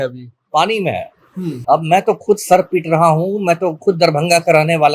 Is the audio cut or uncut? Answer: cut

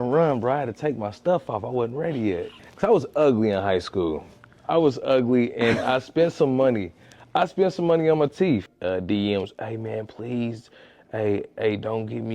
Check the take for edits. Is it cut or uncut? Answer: cut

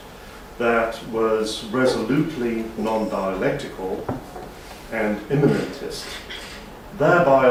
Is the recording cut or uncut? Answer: uncut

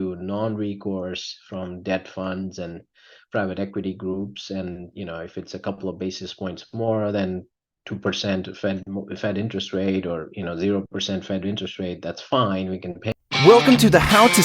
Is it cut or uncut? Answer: cut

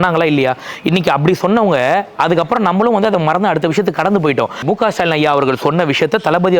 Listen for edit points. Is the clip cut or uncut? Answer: cut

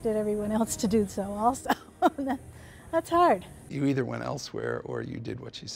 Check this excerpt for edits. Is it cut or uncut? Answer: cut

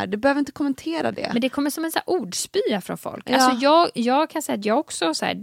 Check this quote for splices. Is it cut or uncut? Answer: uncut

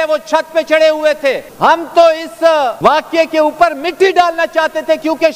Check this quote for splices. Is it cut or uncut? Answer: cut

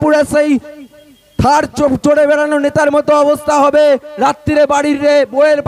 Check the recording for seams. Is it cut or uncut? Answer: uncut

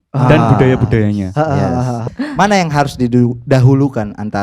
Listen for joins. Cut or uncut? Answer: cut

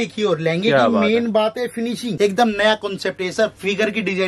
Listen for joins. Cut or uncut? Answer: cut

